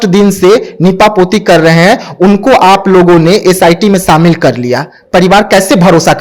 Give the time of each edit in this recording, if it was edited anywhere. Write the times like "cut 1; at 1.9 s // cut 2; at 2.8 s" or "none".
none

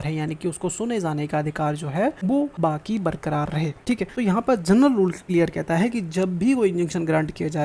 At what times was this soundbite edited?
cut 1; at 2.4 s // cut 2; at 4.0 s // cut 3; at 5.2 s

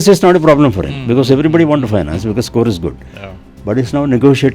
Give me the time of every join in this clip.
none

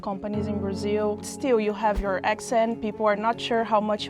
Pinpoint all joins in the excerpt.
cut 1; at 1.3 s

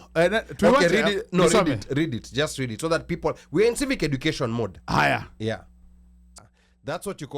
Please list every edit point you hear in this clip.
cut 1; at 6.4 s

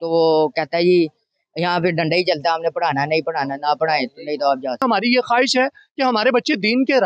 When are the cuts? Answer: cut 1; at 4.8 s

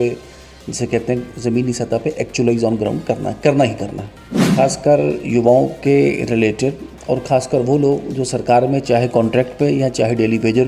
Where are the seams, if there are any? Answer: cut 1; at 4.5 s

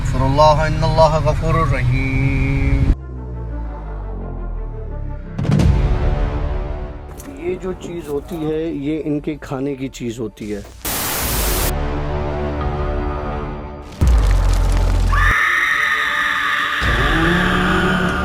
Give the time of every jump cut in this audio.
none

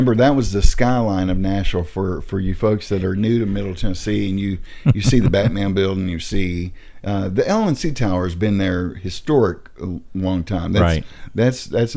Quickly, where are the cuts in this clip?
none

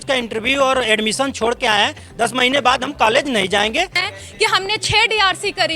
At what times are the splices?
cut 1; at 4.0 s

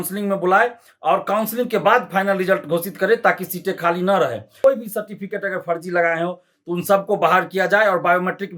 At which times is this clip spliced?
cut 1; at 4.6 s

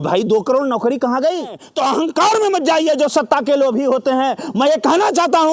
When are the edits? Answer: cut 1; at 1.6 s

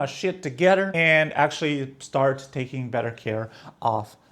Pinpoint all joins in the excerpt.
cut 1; at 0.9 s

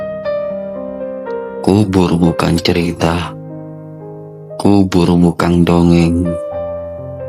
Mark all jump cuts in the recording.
none

